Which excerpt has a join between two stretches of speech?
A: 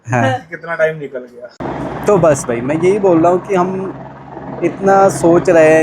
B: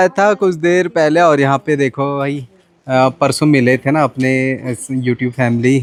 A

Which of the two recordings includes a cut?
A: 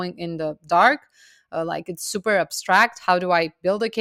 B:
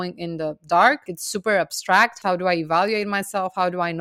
B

